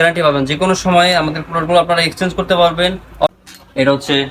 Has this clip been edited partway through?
yes; 1 cut; at 3.3 s

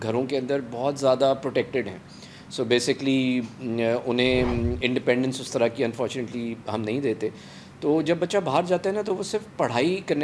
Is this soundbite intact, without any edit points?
yes; 0 cuts

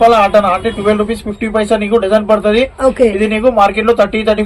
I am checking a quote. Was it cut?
no; 0 cuts

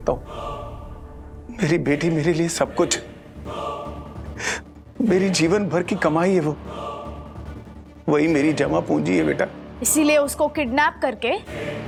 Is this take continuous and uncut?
yes; 0 cuts

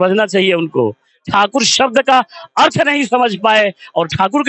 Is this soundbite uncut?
yes; 0 cuts

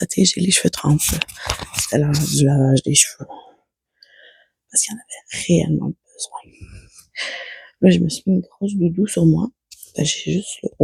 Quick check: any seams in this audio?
no; 0 cuts

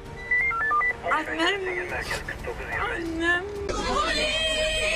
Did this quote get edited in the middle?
yes; 1 cut; at 3.6 s

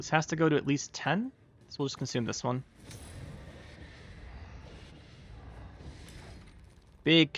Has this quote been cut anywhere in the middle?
no; 0 cuts

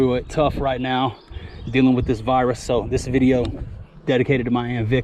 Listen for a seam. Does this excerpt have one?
no; 0 cuts

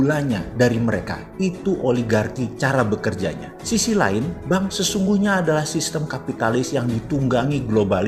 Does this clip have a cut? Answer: no; 0 cuts

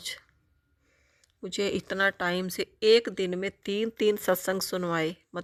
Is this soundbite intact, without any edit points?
yes; 0 cuts

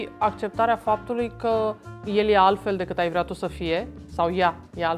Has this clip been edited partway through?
yes; 1 cut; at 1.9 s

